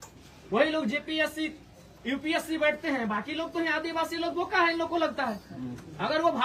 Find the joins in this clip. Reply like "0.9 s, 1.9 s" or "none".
none